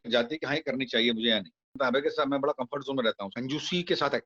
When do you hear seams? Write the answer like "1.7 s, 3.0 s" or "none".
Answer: 1.7 s, 3.4 s

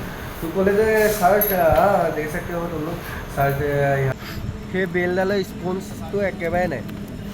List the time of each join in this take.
4.2 s

